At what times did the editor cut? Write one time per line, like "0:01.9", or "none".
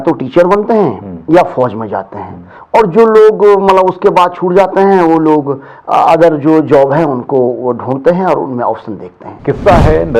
0:09.3